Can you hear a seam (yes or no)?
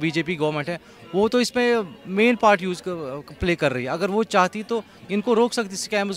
no